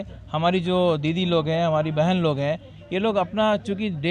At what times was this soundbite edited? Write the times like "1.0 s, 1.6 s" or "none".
none